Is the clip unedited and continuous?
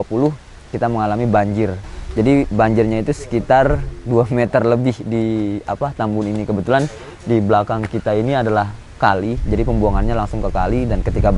no; 1 cut; at 1.8 s

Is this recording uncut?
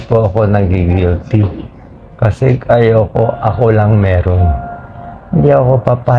yes; 0 cuts

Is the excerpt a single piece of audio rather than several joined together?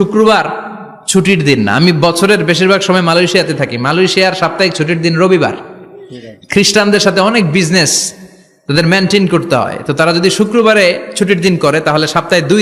yes; 0 cuts

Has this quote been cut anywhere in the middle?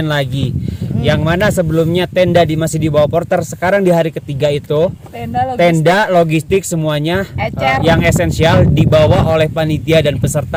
no; 0 cuts

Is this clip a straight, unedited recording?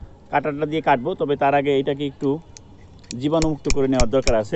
yes; 0 cuts

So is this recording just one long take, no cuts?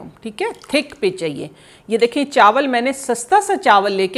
yes; 0 cuts

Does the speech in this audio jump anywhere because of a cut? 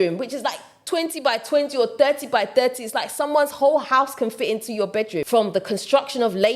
yes; 1 cut; at 5.3 s

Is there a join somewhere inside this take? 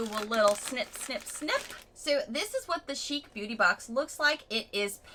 no; 0 cuts

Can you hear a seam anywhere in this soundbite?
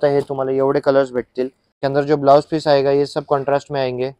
yes; 1 cut; at 1.6 s

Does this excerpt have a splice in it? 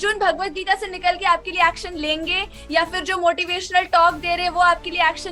no; 0 cuts

